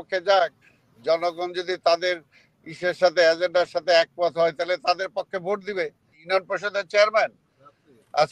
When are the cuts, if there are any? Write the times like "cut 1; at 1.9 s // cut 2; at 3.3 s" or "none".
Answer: cut 1; at 6.2 s